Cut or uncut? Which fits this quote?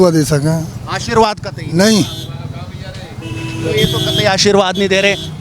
uncut